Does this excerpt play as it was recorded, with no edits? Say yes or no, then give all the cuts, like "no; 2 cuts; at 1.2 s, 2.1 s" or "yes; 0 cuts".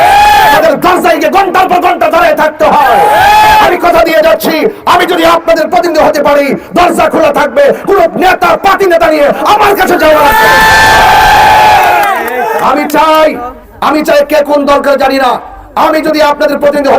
no; 1 cut; at 12.6 s